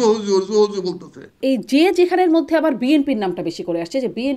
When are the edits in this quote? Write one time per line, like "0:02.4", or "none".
0:01.4